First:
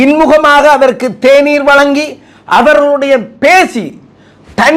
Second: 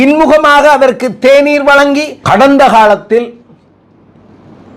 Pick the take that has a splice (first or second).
second